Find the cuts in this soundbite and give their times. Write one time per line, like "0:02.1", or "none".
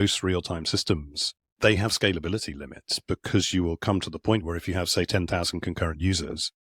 none